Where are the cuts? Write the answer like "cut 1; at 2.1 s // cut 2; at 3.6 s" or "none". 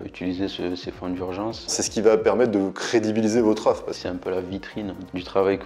cut 1; at 1.8 s // cut 2; at 3.9 s